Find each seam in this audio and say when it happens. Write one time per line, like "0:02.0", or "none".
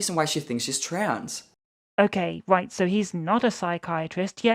none